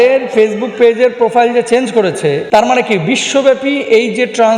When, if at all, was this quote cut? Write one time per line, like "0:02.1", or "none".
0:02.4